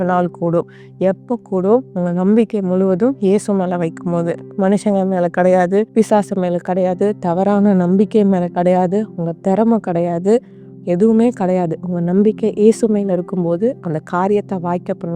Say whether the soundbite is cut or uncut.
uncut